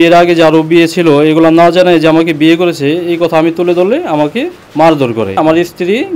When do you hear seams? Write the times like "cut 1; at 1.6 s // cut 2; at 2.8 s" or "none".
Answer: cut 1; at 4.6 s // cut 2; at 5.4 s

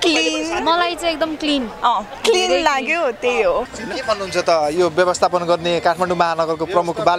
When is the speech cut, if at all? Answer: cut 1; at 3.8 s

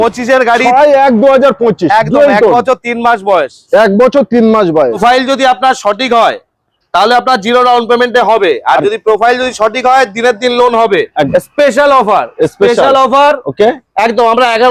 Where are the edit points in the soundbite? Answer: cut 1; at 5.0 s // cut 2; at 11.3 s

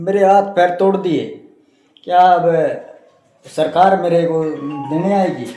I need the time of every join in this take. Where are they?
none

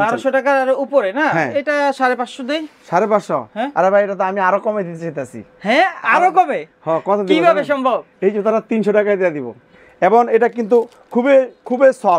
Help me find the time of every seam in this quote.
cut 1; at 9.6 s

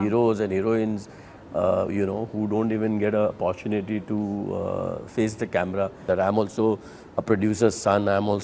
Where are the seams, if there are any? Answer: cut 1; at 6.0 s

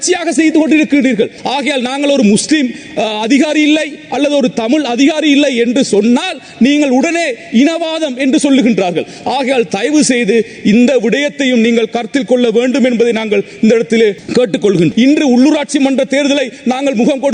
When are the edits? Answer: cut 1; at 1.4 s // cut 2; at 14.9 s

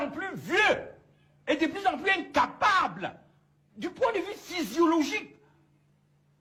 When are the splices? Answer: none

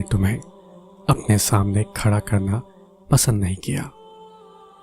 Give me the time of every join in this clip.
cut 1; at 3.9 s

